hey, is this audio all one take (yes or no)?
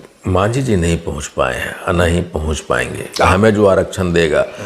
no